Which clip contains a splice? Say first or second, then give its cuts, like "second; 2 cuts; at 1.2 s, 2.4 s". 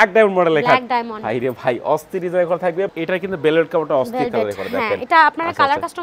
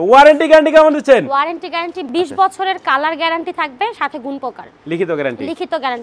first; 1 cut; at 2.9 s